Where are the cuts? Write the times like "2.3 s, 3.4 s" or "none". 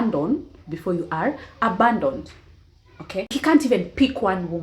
3.3 s